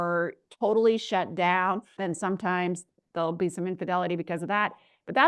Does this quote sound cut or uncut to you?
cut